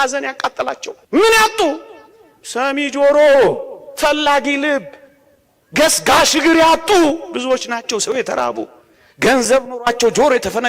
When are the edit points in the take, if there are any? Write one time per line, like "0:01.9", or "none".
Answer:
0:00.9